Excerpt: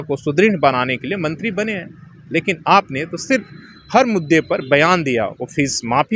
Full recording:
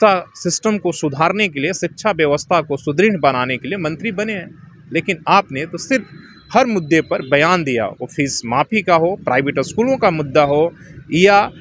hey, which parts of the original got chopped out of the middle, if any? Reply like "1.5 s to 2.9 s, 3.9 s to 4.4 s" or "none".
none